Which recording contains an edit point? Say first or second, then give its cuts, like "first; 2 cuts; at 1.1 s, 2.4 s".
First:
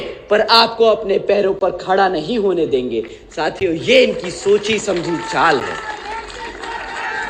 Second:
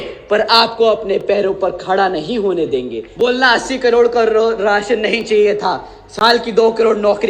second; 1 cut; at 3.0 s